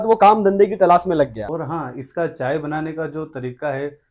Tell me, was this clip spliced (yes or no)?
yes